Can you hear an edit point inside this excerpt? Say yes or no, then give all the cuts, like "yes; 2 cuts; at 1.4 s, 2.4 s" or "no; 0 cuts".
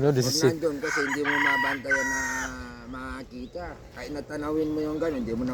no; 0 cuts